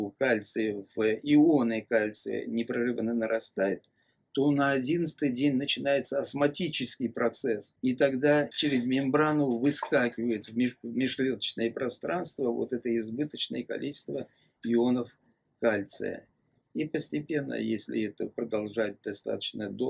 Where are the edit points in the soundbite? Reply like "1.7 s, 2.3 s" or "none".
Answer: 7.7 s, 8.5 s